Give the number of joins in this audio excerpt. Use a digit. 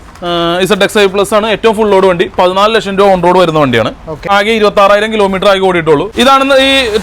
2